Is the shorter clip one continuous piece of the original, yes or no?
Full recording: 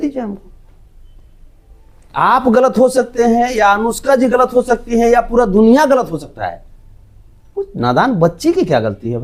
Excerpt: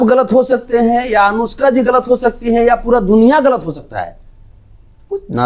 yes